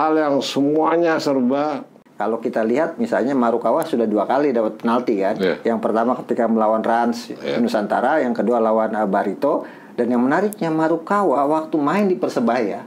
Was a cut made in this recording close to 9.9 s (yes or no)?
no